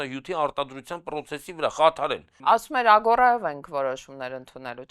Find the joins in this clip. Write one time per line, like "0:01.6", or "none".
0:02.4

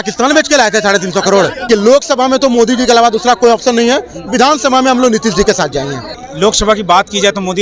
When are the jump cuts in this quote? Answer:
0:01.7
0:06.2

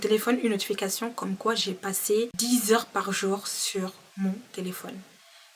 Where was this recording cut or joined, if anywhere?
0:02.4

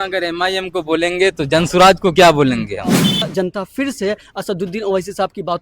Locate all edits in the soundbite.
0:03.2

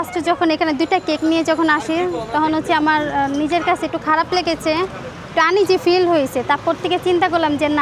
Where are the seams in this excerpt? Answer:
none

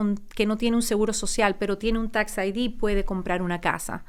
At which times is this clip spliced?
none

